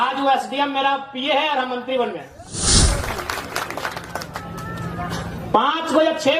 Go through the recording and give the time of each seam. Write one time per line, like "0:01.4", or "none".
0:02.6